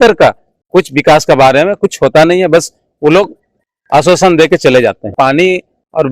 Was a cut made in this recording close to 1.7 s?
no; 1 cut; at 5.1 s

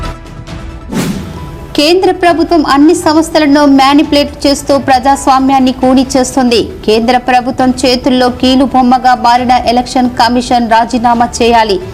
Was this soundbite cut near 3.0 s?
no; 1 cut; at 1.0 s

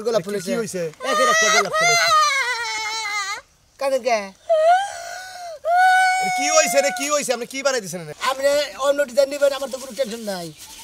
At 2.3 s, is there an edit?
no; 1 cut; at 8.0 s

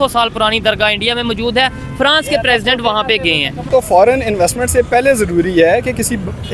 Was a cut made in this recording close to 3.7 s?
yes; 1 cut; at 3.7 s

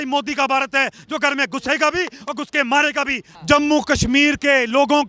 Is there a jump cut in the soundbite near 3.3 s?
yes; 1 cut; at 3.3 s

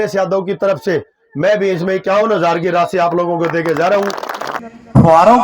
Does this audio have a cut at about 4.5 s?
yes; 1 cut; at 4.5 s

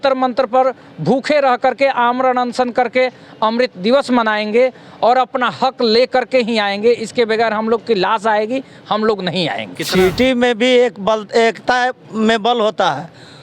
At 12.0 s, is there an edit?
no; 1 cut; at 9.7 s

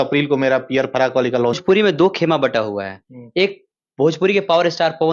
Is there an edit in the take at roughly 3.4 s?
no; 1 cut; at 1.6 s

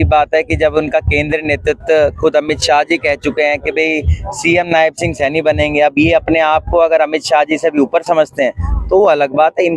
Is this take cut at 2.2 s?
no; 0 cuts

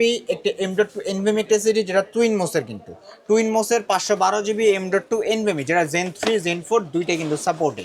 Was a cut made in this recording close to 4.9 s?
no; 0 cuts

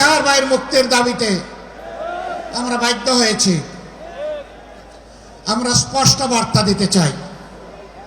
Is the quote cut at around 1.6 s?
no; 0 cuts

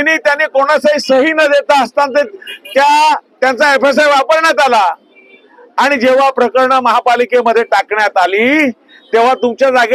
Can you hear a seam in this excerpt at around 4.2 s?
no; 0 cuts

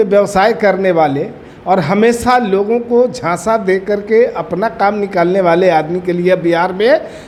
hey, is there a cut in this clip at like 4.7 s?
no; 0 cuts

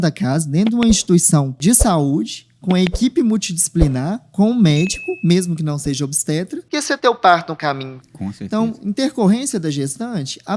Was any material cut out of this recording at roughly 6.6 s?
yes; 2 cuts; at 1.6 s, 6.6 s

